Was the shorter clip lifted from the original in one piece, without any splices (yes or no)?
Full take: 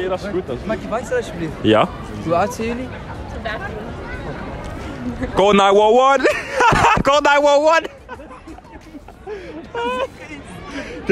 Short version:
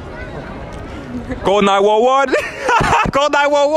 yes